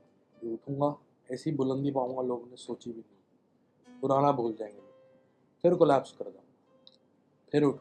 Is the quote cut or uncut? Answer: uncut